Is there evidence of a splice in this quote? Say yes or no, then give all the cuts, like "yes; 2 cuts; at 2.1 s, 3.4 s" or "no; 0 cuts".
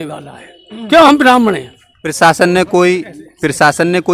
no; 0 cuts